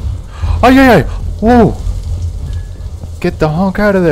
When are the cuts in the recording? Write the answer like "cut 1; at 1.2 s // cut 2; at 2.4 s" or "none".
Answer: none